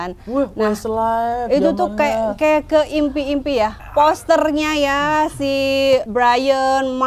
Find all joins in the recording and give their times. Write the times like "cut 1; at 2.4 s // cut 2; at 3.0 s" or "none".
cut 1; at 3.8 s // cut 2; at 6.1 s